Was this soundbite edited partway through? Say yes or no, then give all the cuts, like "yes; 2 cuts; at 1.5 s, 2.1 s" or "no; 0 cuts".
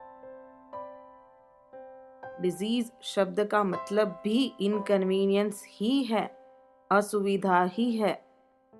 yes; 1 cut; at 2.3 s